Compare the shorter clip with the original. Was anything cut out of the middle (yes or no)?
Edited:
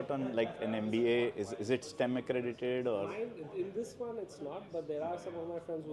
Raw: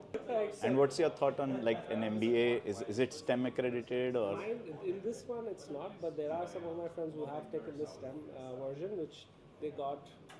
no